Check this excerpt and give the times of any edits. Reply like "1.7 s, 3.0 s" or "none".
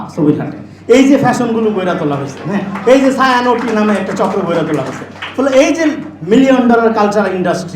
none